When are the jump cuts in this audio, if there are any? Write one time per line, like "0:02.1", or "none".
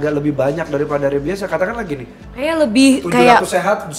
0:02.2